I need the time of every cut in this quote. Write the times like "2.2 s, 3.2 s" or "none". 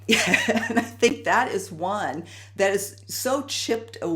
none

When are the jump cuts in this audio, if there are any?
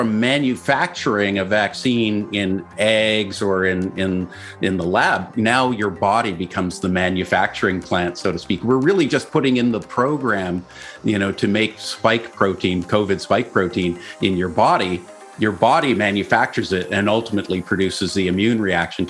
none

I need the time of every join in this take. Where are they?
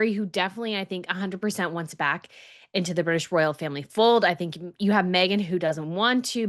none

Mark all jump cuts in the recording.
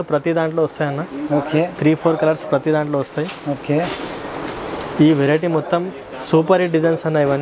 none

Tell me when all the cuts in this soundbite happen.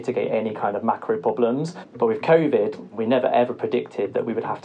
1.8 s, 2.9 s

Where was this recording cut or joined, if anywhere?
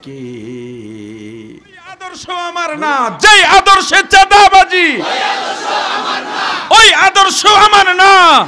2.2 s

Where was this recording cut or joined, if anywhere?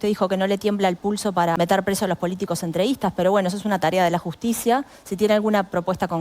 1.5 s

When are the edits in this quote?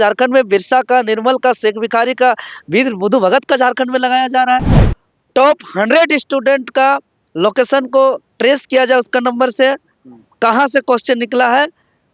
4.7 s

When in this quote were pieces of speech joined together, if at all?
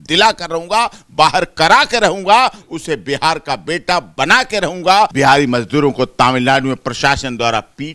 5.1 s

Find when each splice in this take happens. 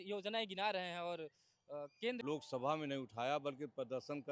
2.2 s

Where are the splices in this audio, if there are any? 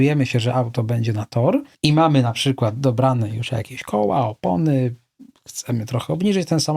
1.7 s

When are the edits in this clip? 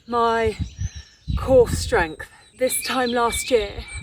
2.4 s

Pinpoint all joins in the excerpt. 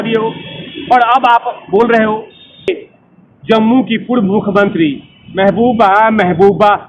2.7 s

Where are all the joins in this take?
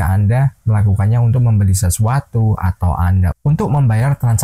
none

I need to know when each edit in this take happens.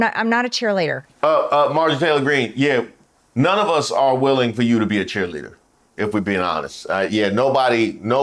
1.0 s

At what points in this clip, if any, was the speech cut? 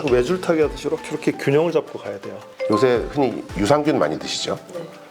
2.5 s

